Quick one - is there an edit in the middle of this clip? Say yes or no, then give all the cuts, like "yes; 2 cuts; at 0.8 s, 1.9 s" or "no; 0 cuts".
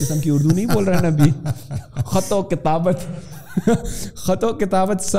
no; 0 cuts